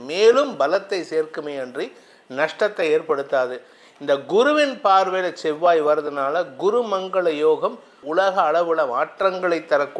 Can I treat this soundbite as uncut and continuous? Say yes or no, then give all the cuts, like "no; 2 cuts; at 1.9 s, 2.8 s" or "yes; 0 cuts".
no; 1 cut; at 7.9 s